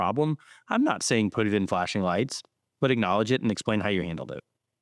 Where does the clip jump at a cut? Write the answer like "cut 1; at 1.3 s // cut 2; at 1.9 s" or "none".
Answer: none